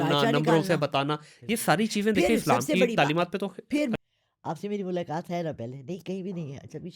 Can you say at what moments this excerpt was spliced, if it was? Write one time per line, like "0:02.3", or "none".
0:04.0

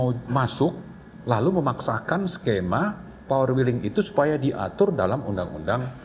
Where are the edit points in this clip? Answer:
none

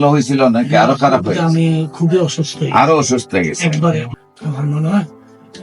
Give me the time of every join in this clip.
0:04.1

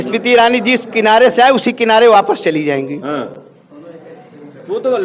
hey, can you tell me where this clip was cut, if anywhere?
none

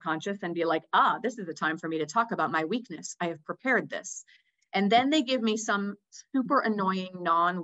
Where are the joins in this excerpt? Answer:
none

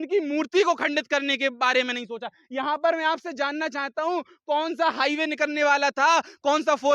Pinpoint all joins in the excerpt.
none

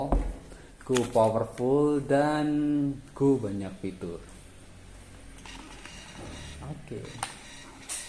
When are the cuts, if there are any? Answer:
none

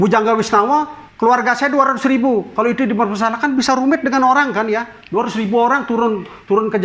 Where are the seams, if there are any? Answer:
none

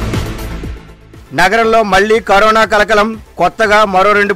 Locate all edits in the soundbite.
0:00.9

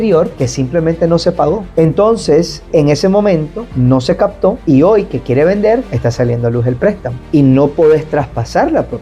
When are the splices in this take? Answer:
0:01.7
0:07.1

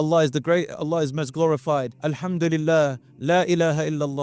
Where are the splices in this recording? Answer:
0:01.9

